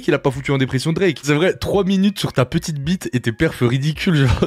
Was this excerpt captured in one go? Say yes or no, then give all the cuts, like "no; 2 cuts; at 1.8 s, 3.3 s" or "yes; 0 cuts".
no; 1 cut; at 1.2 s